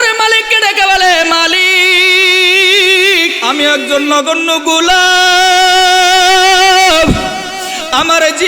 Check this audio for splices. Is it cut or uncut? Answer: cut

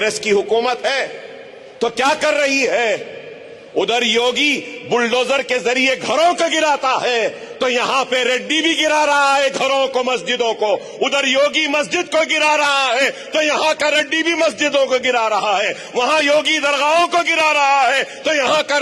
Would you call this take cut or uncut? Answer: uncut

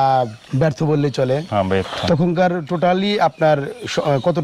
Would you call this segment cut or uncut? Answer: uncut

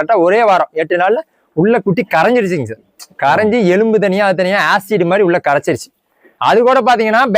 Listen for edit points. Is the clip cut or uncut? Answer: cut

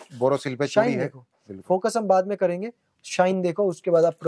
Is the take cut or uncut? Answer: uncut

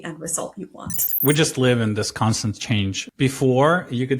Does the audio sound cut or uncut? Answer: cut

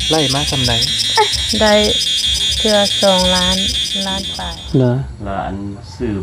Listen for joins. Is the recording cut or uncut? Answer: cut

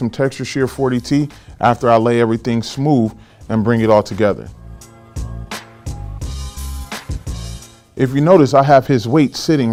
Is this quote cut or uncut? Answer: uncut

